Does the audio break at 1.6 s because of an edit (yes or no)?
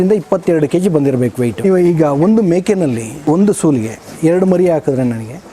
yes